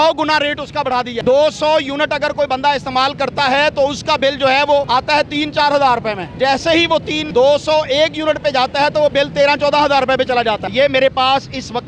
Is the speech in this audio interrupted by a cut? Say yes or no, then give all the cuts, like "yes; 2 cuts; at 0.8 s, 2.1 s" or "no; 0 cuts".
yes; 5 cuts; at 1.2 s, 4.9 s, 6.2 s, 7.2 s, 10.7 s